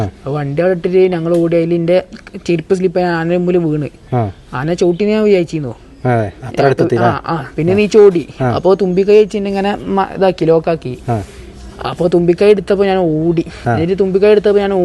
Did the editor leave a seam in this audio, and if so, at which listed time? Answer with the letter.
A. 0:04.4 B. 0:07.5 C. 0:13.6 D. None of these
C